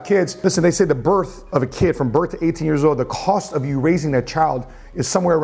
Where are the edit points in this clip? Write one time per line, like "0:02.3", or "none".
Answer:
none